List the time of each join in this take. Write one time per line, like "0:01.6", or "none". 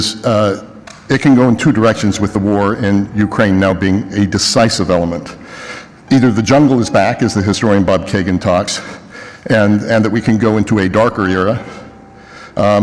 none